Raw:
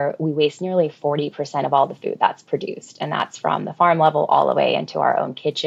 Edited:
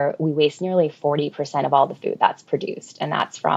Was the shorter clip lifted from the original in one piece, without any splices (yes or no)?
yes